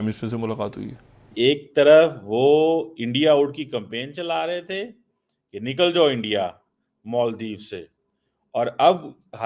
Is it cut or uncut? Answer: cut